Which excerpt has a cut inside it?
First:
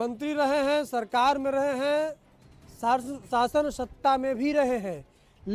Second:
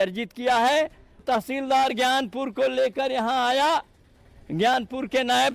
second; 1 cut; at 1.2 s

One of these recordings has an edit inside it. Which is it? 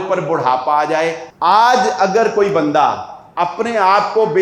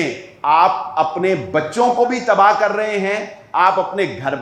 first; 1 cut; at 1.2 s

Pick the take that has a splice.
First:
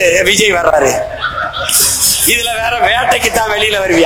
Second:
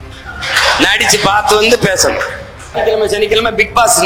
second; 1 cut; at 2.7 s

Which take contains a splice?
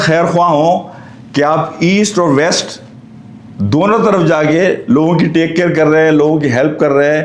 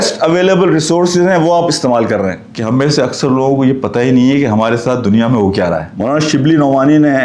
second; 2 cuts; at 2.5 s, 5.9 s

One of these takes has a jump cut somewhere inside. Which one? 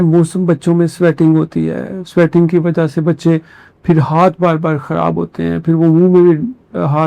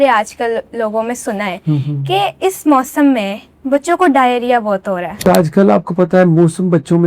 second; 1 cut; at 5.2 s

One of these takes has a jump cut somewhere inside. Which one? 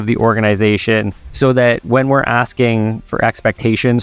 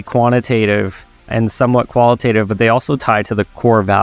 first; 2 cuts; at 1.2 s, 3.0 s

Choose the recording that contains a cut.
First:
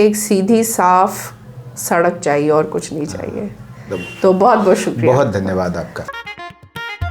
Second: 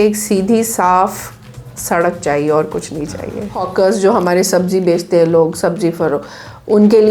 second; 1 cut; at 3.6 s

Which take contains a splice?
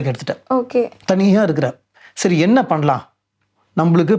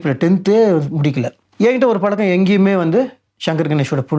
second; 1 cut; at 1.4 s

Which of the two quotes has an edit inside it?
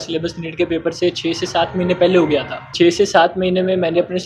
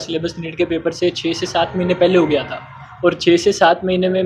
first; 1 cut; at 2.7 s

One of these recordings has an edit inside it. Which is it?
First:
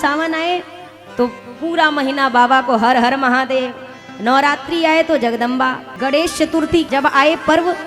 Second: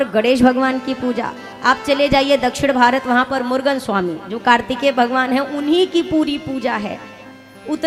first; 2 cuts; at 5.9 s, 6.9 s

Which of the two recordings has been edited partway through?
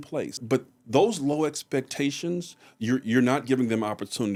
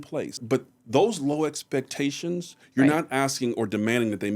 second; 1 cut; at 2.6 s

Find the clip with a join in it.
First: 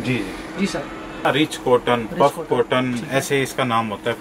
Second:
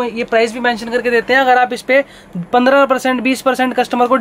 first; 1 cut; at 1.2 s

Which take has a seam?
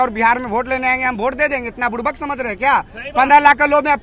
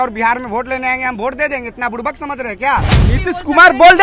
second; 1 cut; at 2.9 s

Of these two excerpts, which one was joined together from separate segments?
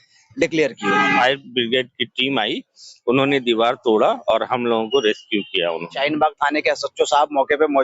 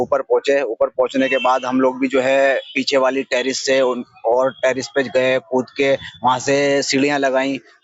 first; 2 cuts; at 1.2 s, 6.0 s

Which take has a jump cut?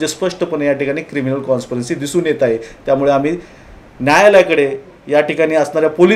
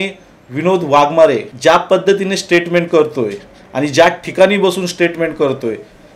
second; 1 cut; at 1.5 s

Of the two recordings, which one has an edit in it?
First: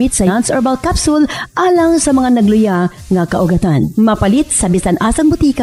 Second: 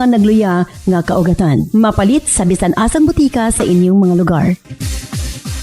second; 1 cut; at 4.7 s

